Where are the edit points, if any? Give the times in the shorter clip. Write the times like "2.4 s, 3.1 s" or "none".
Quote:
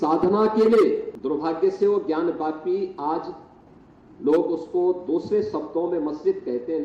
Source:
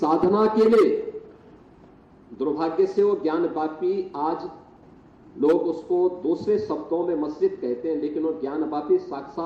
1.1 s